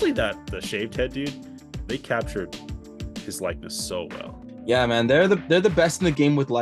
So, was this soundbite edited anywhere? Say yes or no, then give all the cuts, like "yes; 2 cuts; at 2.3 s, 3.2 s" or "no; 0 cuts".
no; 0 cuts